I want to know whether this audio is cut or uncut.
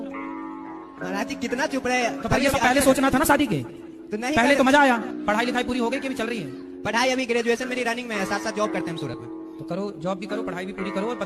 uncut